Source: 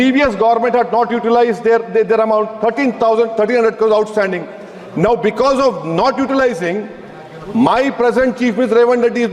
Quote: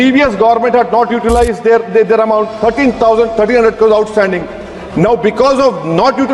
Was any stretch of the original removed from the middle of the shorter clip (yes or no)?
no